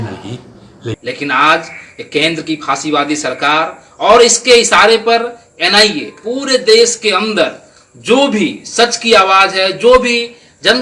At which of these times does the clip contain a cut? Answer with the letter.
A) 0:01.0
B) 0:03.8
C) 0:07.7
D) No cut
A